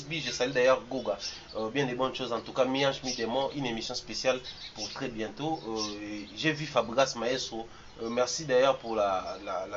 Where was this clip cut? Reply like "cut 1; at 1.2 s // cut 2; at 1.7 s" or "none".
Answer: none